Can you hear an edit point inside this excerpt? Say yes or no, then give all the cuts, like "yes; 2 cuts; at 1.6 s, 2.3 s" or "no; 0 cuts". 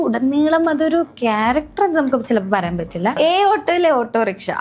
yes; 1 cut; at 3.2 s